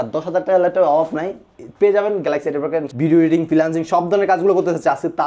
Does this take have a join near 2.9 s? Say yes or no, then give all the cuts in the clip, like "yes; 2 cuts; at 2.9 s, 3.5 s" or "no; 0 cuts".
yes; 1 cut; at 2.9 s